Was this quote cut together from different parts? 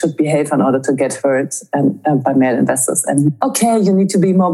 yes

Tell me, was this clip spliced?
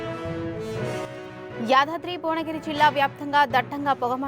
no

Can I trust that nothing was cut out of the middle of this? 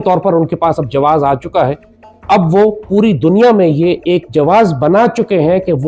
yes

